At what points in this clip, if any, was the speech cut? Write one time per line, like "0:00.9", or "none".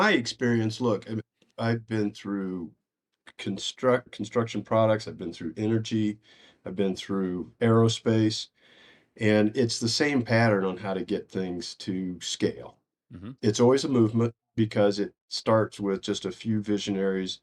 0:01.2
0:04.1
0:07.5
0:13.3
0:14.5

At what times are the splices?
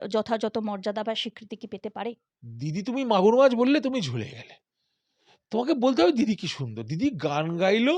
0:02.2

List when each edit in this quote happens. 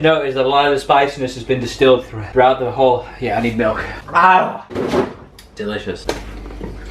0:05.9

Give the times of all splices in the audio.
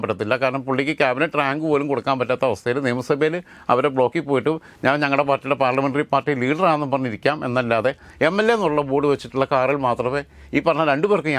none

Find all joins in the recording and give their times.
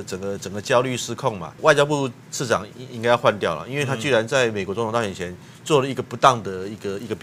0:01.6

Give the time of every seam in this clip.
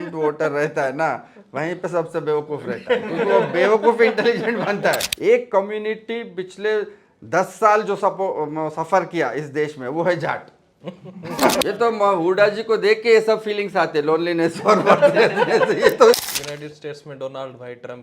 0:05.1
0:11.6
0:16.2

